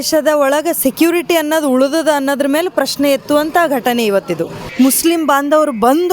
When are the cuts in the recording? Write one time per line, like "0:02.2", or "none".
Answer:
0:04.6